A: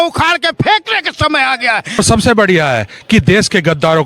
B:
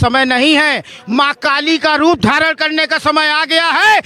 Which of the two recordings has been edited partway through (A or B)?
A